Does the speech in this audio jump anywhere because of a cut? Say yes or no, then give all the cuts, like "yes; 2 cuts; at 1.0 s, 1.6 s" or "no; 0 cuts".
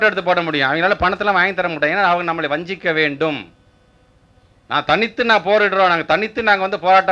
no; 0 cuts